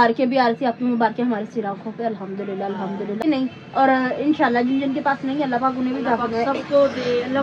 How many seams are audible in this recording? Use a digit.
1